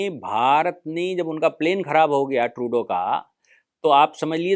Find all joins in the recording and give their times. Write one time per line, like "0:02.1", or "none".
none